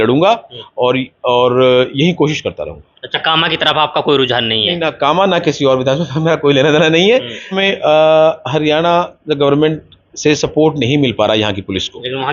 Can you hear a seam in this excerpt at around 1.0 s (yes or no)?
no